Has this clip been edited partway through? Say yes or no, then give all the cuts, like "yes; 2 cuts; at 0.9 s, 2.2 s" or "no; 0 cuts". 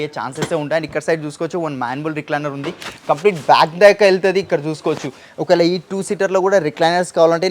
no; 0 cuts